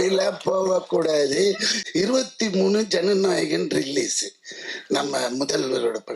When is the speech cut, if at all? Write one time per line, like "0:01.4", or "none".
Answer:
0:01.7

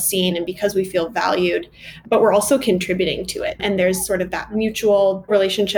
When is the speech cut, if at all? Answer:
0:01.9
0:03.6

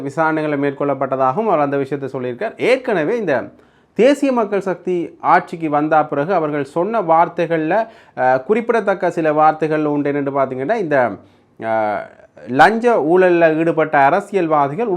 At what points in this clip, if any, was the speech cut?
none

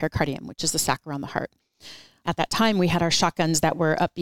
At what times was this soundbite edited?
0:02.2

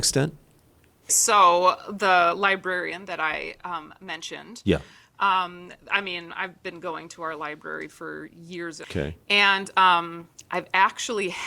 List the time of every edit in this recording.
0:01.2
0:08.8

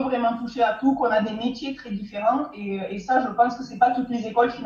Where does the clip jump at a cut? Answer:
none

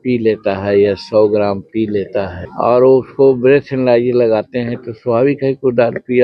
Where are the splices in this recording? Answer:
0:02.4

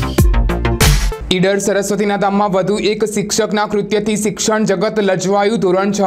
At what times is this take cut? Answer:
0:01.1

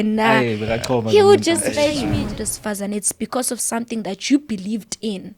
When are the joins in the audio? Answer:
0:02.0

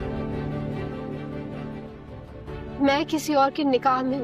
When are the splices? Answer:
0:01.5

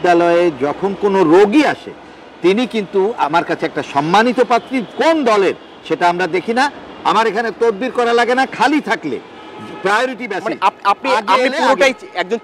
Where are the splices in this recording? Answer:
none

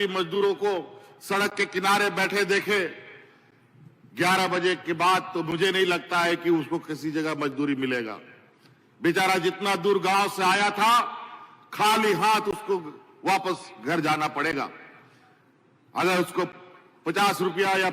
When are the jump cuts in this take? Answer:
none

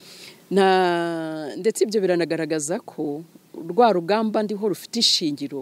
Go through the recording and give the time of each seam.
none

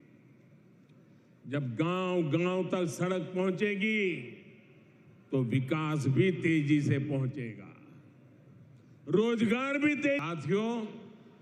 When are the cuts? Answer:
0:10.2

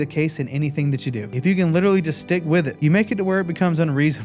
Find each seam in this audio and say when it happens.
0:01.3
0:02.7

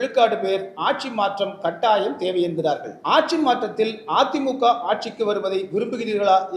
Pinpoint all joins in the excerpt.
0:02.9

